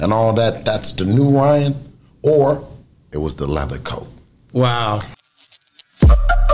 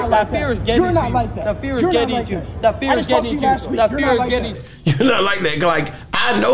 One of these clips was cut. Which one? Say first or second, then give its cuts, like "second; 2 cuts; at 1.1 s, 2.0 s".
first; 1 cut; at 5.1 s